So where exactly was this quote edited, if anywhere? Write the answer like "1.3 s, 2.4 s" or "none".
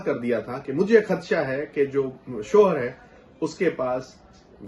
none